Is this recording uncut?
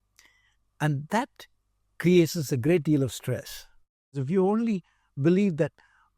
no; 1 cut; at 4.2 s

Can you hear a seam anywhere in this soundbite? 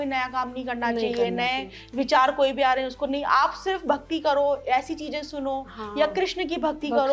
no; 0 cuts

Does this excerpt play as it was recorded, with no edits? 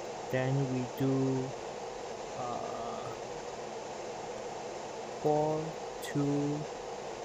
yes; 0 cuts

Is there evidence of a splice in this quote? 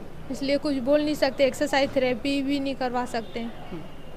no; 0 cuts

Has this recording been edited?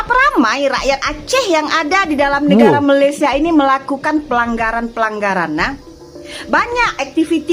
no; 0 cuts

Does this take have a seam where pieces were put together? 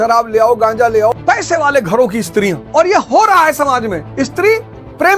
yes; 3 cuts; at 1.1 s, 2.6 s, 4.0 s

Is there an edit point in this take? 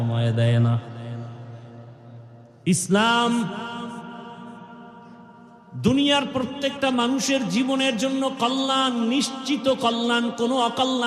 no; 0 cuts

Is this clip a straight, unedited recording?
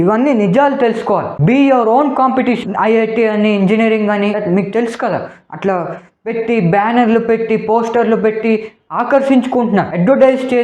no; 2 cuts; at 2.6 s, 4.4 s

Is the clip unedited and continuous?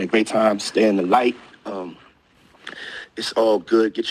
yes; 0 cuts

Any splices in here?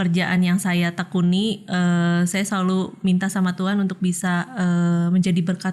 no; 0 cuts

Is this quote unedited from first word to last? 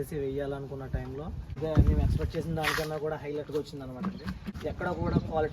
no; 2 cuts; at 1.6 s, 4.5 s

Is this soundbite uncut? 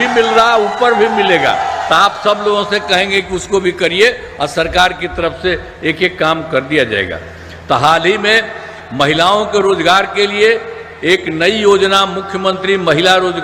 yes; 0 cuts

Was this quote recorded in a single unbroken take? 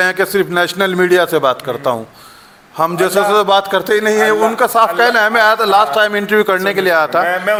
yes; 0 cuts

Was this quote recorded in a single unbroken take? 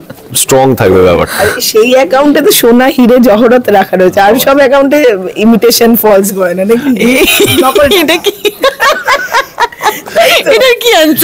yes; 0 cuts

